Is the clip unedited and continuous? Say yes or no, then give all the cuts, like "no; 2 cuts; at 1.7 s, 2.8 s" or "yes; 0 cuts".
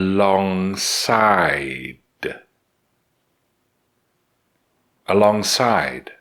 yes; 0 cuts